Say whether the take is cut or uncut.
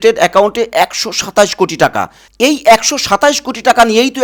uncut